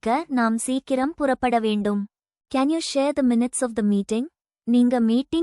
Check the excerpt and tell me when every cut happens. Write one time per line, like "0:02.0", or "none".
0:02.4